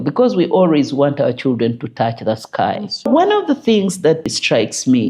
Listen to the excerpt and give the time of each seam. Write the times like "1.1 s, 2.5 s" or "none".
3.1 s, 4.3 s